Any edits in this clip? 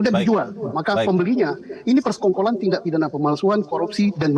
no; 0 cuts

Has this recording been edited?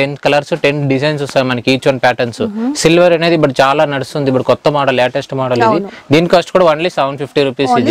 no; 0 cuts

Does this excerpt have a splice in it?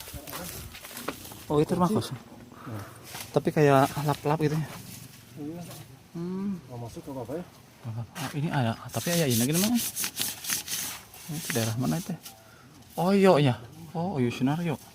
no; 0 cuts

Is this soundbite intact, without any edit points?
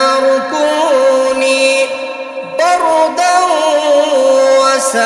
yes; 0 cuts

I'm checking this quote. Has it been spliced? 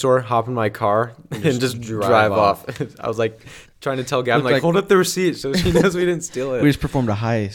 no; 0 cuts

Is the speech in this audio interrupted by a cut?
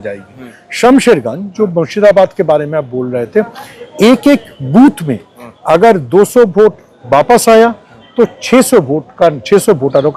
no; 0 cuts

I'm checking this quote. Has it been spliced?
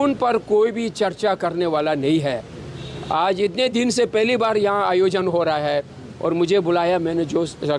no; 0 cuts

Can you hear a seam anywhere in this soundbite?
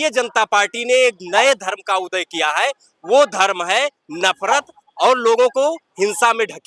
no; 0 cuts

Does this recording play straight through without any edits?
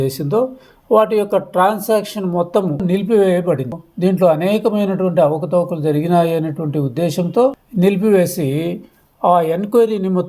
no; 2 cuts; at 2.8 s, 3.8 s

